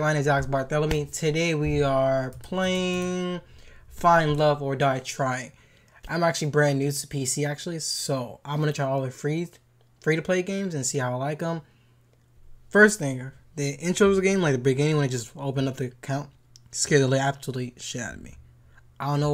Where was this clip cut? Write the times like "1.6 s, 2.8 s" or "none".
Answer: none